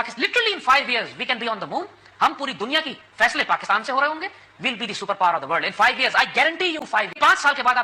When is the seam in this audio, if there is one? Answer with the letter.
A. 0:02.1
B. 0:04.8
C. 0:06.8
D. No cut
D